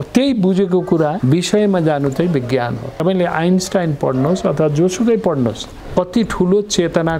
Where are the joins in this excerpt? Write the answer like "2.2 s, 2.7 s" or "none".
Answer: 1.2 s, 3.0 s, 5.7 s